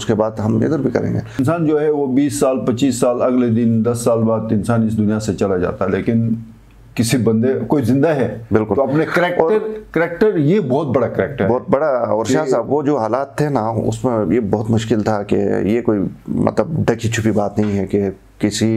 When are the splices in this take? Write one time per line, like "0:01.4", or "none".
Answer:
0:01.4